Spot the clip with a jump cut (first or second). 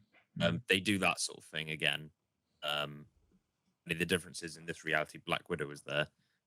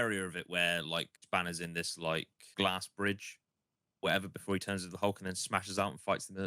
second